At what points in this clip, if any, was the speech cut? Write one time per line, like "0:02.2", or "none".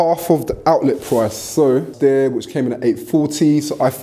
0:01.9